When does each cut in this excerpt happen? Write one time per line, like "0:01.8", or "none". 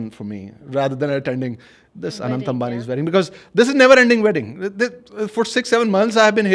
none

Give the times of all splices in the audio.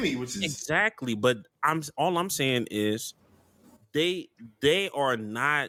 none

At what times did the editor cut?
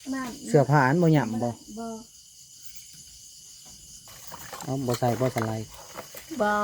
0:04.2

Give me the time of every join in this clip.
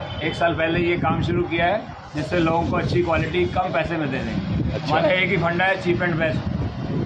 none

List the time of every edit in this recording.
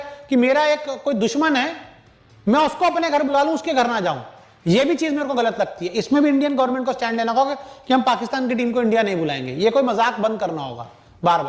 none

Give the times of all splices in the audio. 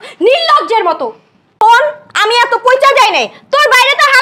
none

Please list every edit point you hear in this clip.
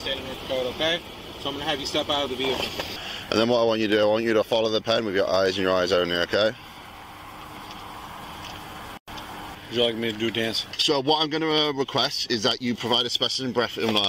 0:02.9
0:09.5
0:10.7

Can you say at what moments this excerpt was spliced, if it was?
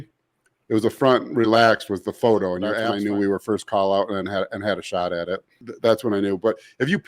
0:02.8

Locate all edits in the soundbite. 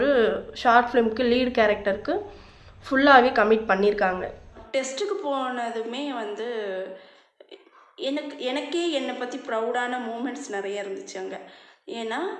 0:04.5

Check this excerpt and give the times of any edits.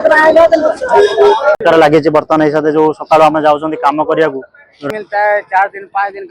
0:01.6
0:04.8

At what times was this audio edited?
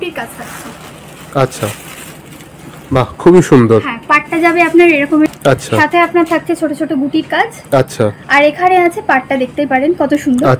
0:05.3

